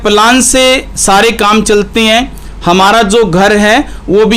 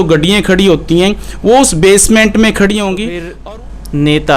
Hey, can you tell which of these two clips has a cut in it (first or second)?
second